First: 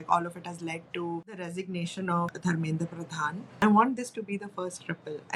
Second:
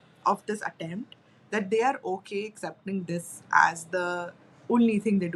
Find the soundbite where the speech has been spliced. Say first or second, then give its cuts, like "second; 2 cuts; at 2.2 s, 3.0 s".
first; 2 cuts; at 2.3 s, 3.6 s